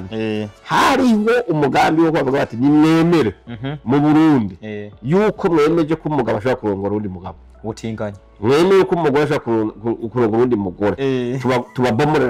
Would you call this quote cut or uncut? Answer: uncut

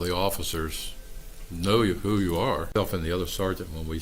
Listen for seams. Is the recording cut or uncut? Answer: cut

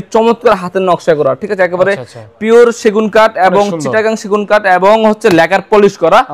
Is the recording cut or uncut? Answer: uncut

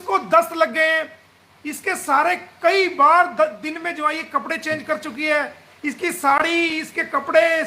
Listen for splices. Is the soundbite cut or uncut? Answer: uncut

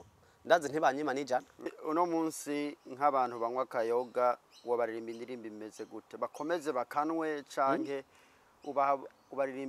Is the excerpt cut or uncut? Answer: cut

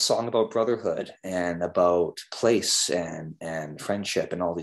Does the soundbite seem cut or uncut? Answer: uncut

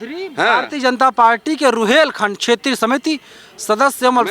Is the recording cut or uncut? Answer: uncut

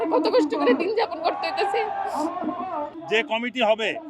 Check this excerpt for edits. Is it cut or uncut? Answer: cut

